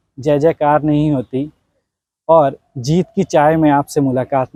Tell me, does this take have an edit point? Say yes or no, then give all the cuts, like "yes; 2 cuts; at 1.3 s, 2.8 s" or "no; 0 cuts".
no; 0 cuts